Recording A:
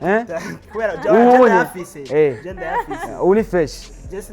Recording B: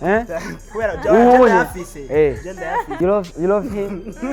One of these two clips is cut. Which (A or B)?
B